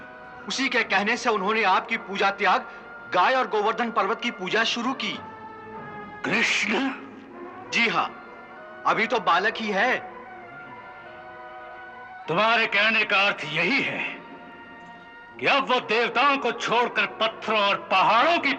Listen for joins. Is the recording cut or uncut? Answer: uncut